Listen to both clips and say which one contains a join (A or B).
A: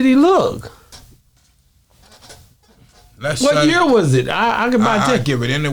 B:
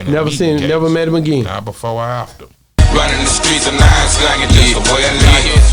B